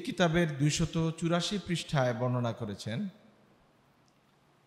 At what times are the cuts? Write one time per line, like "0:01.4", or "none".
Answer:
none